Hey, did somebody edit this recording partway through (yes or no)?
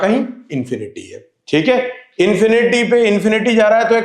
no